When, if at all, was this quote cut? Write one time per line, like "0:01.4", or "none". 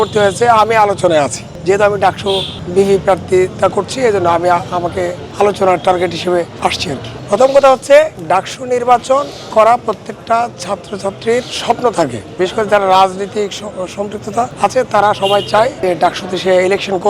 none